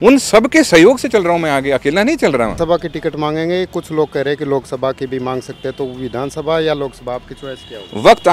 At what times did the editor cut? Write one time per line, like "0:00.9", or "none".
0:02.6